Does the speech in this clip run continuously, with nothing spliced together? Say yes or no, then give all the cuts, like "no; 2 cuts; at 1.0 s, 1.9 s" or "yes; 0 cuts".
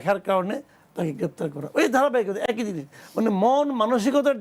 yes; 0 cuts